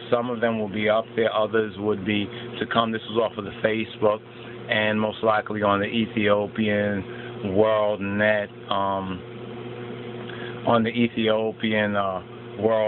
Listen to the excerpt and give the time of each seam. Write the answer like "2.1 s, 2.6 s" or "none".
10.3 s

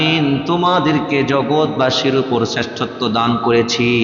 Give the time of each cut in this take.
none

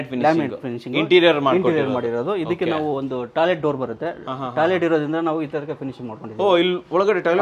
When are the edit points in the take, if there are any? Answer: none

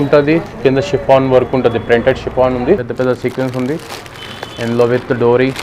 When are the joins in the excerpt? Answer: 2.9 s

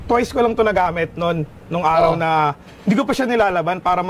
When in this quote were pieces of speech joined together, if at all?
none

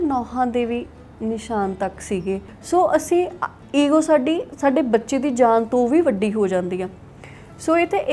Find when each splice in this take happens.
2.5 s

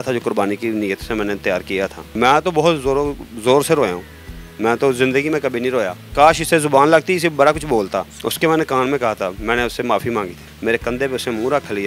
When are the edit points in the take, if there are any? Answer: 2.0 s, 6.0 s, 8.2 s, 10.5 s

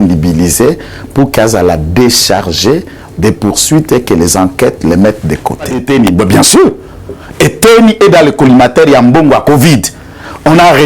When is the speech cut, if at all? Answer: 5.8 s

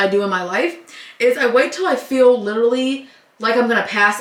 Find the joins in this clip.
none

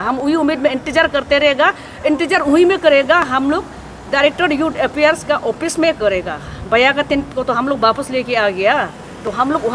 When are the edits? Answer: none

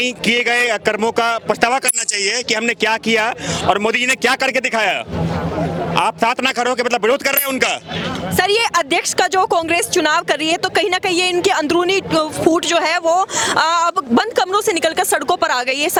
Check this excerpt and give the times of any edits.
none

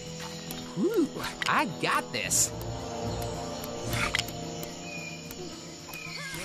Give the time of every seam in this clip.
none

